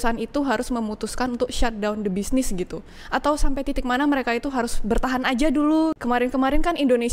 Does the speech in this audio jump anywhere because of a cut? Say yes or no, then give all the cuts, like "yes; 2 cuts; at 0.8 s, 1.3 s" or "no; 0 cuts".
yes; 1 cut; at 5.9 s